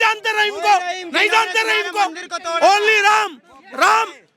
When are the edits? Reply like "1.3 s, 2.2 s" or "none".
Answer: none